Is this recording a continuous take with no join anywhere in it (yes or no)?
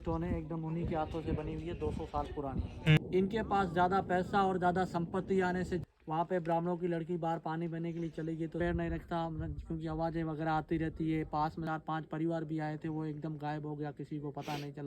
no